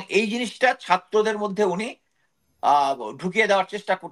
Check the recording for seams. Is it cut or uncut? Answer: uncut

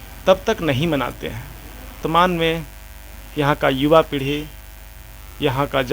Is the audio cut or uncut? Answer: cut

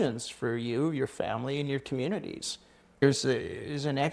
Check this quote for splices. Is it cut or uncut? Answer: cut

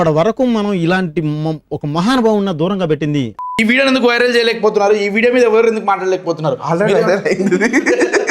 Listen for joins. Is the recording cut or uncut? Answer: cut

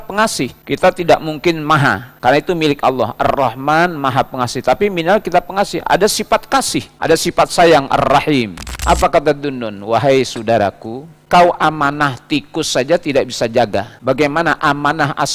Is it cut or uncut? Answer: cut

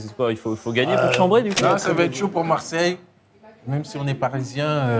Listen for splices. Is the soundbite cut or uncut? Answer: cut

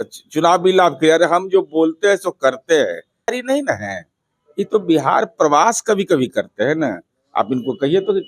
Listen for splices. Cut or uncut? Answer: cut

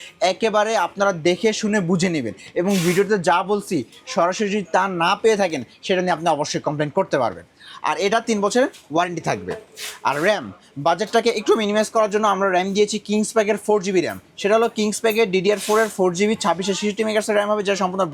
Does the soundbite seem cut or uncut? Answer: uncut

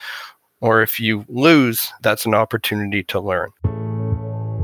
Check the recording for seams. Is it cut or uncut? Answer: cut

